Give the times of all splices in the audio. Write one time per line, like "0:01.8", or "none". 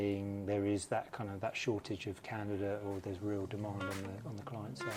none